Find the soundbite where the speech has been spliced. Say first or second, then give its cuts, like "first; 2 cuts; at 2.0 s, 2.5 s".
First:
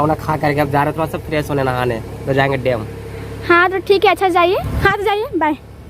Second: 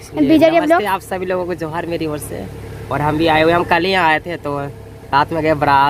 first; 1 cut; at 4.7 s